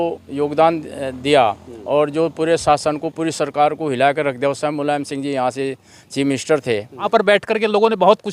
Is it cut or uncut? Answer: cut